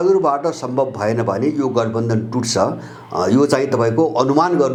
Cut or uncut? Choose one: uncut